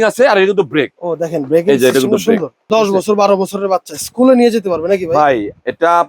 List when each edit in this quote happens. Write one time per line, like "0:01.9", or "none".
0:02.6